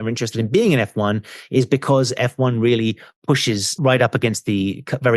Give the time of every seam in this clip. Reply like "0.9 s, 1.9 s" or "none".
3.7 s